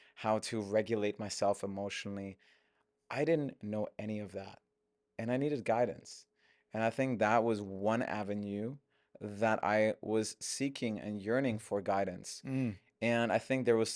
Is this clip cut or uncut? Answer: uncut